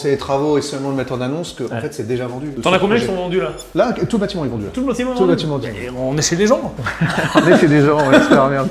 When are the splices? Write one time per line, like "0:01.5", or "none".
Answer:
none